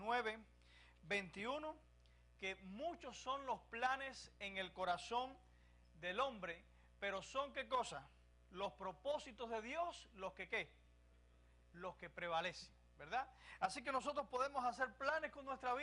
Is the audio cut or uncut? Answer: cut